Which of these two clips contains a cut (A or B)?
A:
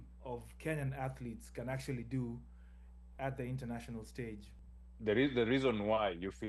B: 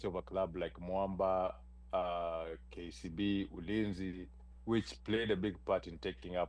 A